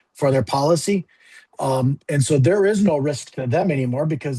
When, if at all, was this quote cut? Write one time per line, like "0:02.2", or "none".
none